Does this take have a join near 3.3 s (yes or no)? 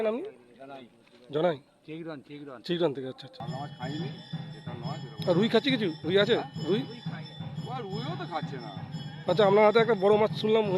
yes